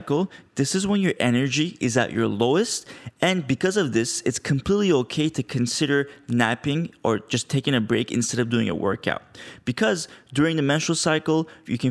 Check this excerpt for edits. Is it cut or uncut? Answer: uncut